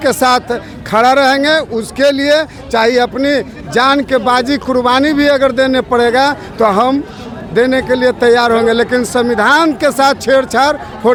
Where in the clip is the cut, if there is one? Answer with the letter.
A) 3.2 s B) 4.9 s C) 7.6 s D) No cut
D